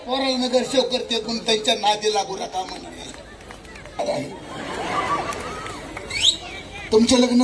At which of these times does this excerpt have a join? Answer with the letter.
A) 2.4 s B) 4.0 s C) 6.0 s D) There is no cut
B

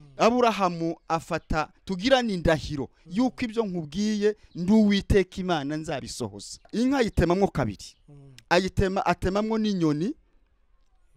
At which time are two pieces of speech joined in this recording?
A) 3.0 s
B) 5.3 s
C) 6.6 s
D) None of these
C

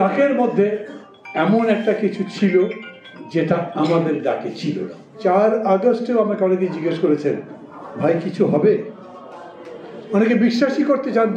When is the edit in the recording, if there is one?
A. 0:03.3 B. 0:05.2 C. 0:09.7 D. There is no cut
B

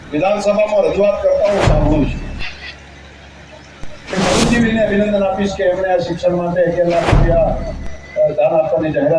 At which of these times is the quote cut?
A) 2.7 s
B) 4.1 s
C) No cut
B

